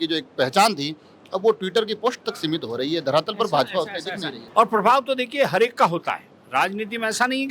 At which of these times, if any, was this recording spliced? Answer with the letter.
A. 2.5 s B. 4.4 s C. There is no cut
B